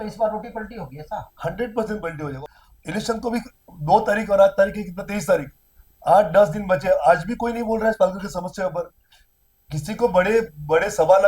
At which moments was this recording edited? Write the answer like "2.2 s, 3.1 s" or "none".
2.3 s